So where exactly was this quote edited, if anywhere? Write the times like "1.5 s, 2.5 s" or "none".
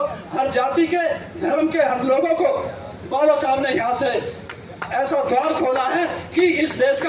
none